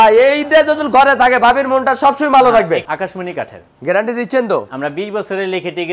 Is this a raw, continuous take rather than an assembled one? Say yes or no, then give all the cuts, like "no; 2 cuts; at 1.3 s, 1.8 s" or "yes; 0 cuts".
no; 2 cuts; at 2.8 s, 4.7 s